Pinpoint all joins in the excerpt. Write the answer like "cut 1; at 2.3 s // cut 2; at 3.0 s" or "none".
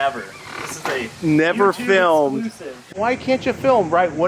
cut 1; at 2.9 s